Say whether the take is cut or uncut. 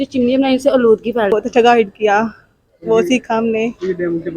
cut